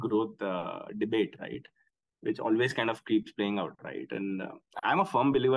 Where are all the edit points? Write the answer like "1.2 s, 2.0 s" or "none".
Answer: none